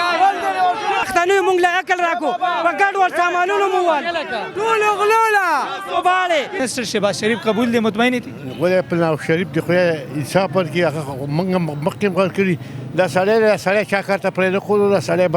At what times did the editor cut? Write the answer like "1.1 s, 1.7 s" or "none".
1.0 s, 6.6 s